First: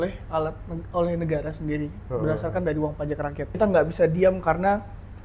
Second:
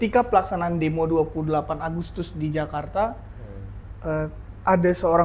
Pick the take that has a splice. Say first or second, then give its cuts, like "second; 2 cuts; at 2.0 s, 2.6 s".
first; 1 cut; at 3.6 s